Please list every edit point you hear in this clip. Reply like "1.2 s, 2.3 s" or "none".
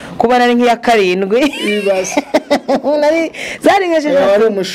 none